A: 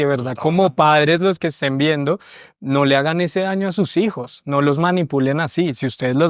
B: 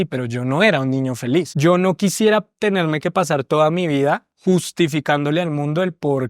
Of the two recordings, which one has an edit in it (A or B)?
B